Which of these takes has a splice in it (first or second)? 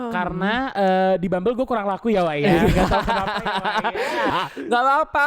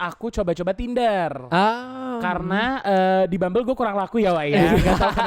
first